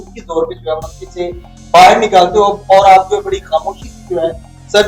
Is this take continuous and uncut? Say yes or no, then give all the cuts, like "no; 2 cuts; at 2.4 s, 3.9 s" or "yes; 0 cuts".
yes; 0 cuts